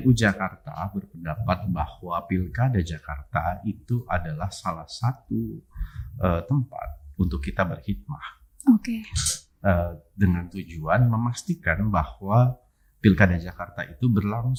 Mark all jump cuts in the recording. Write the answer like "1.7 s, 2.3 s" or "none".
none